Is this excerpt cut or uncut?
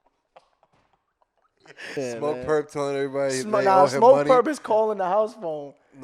cut